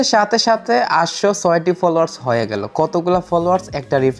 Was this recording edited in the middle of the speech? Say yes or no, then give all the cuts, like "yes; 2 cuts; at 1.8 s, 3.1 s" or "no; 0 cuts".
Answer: no; 0 cuts